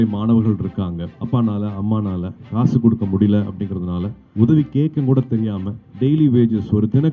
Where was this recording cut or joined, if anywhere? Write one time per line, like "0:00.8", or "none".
0:01.1
0:04.2

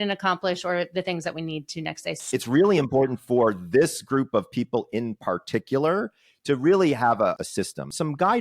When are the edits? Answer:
0:02.2
0:07.4

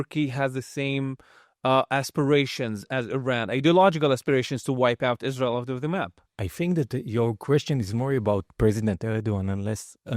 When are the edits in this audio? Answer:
none

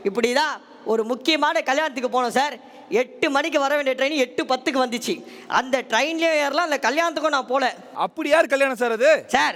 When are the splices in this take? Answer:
none

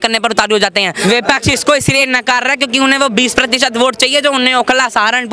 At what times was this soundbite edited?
0:01.0

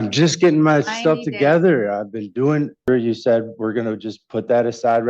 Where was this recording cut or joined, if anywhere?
0:02.9

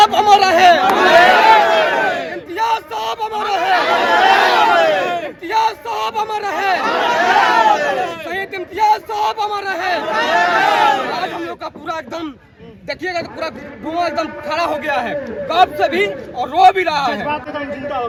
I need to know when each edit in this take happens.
none

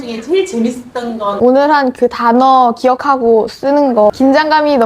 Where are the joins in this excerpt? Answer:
0:01.3
0:04.1

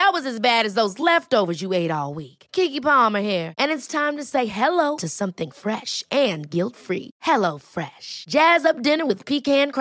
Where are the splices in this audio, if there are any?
none

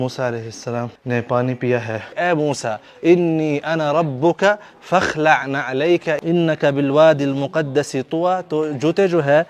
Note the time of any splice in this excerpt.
0:01.0
0:02.1
0:06.1

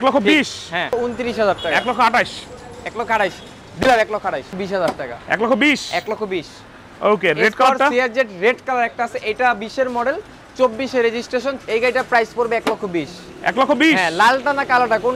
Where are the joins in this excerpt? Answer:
0:00.9
0:04.5
0:11.6

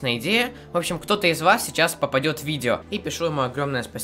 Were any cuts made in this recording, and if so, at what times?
0:02.9

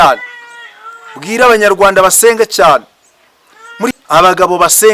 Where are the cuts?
0:03.9

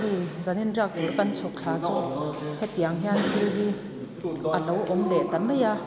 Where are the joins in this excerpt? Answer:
none

